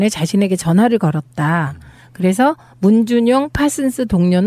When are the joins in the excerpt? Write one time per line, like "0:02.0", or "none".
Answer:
none